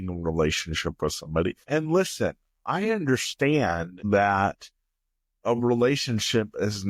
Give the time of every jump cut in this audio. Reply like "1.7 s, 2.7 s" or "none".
1.6 s, 3.9 s